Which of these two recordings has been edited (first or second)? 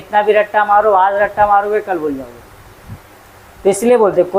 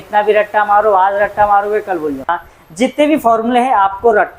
second